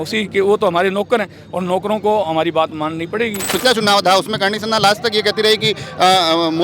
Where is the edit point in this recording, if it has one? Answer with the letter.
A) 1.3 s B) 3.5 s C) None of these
B